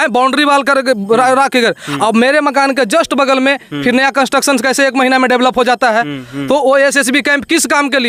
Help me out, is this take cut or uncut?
uncut